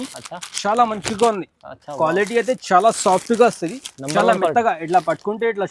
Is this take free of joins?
yes; 0 cuts

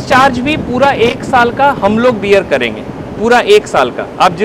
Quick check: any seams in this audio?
no; 0 cuts

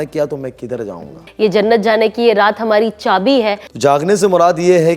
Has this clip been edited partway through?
yes; 2 cuts; at 1.2 s, 3.6 s

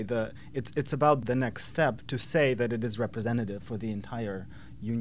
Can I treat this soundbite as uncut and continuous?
no; 1 cut; at 1.2 s

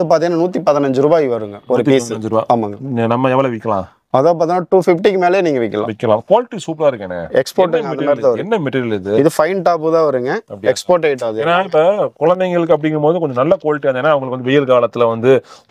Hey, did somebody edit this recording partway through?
no; 0 cuts

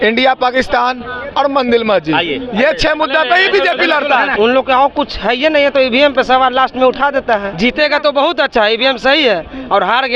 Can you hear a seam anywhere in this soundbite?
yes; 2 cuts; at 4.3 s, 7.5 s

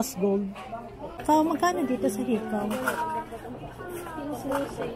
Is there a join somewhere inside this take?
yes; 1 cut; at 1.2 s

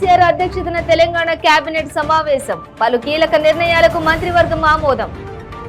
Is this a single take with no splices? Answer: yes; 0 cuts

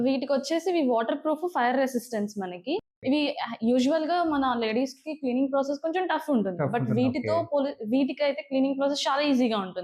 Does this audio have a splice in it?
no; 0 cuts

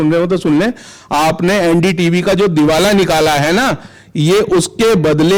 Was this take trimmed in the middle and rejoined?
no; 0 cuts

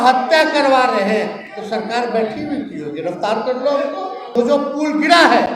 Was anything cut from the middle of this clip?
yes; 1 cut; at 4.3 s

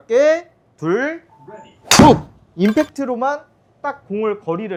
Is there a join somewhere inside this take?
no; 0 cuts

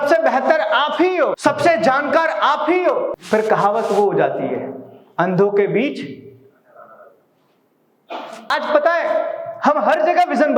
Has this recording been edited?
yes; 3 cuts; at 1.4 s, 3.2 s, 8.5 s

